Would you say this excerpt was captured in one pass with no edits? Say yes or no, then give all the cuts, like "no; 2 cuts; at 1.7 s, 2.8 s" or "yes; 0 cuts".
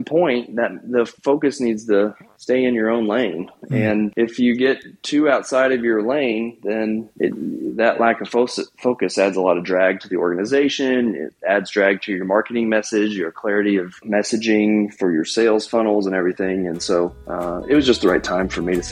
no; 6 cuts; at 1.1 s, 2.3 s, 3.6 s, 7.1 s, 14.0 s, 17.2 s